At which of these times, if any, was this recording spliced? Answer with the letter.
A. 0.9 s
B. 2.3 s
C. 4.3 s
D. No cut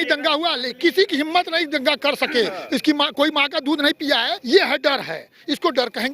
C